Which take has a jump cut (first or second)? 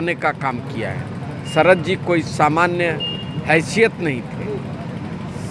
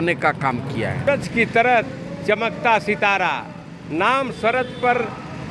second